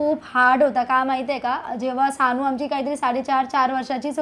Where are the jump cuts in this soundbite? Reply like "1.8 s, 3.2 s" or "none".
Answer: none